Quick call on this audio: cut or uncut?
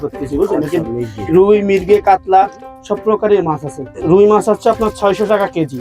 cut